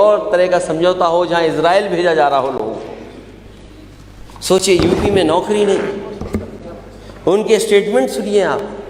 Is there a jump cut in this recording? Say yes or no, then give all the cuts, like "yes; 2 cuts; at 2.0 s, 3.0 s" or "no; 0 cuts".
no; 0 cuts